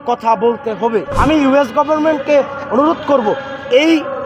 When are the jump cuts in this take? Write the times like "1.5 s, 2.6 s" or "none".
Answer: 1.1 s